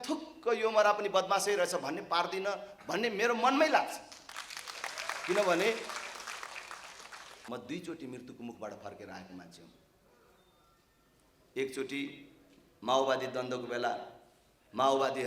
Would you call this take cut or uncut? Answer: cut